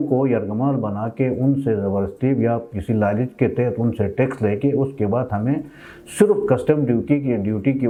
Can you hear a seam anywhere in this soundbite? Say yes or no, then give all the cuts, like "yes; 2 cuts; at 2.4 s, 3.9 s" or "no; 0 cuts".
no; 0 cuts